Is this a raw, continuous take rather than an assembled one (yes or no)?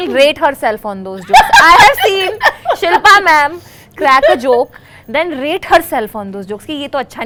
yes